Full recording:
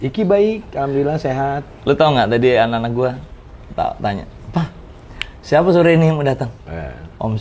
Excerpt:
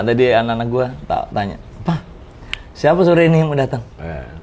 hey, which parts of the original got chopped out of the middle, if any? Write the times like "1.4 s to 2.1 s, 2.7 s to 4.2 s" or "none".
3.2 s to 3.7 s